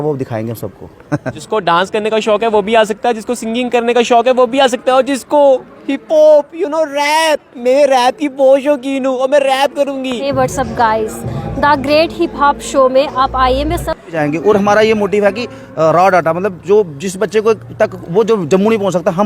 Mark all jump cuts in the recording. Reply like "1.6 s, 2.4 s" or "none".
1.4 s, 10.2 s, 14.1 s

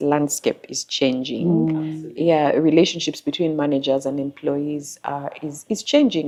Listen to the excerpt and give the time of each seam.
none

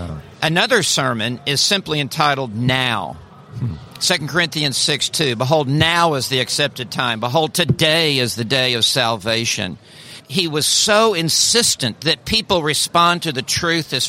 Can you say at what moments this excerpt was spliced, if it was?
10.3 s

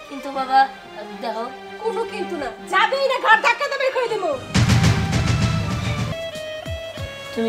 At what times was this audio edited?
6.1 s

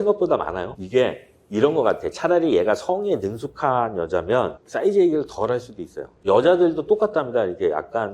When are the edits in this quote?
6.1 s

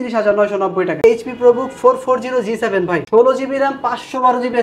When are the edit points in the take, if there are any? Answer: 1.0 s, 3.0 s

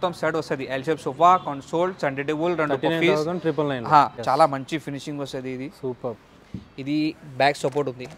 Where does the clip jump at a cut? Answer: 4.2 s

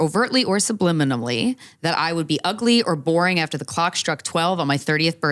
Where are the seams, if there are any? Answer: none

